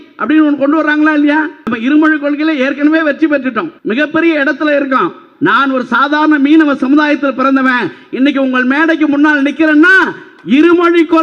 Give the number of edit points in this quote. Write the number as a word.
two